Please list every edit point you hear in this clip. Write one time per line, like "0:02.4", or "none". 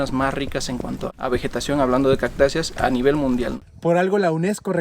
0:01.1
0:03.6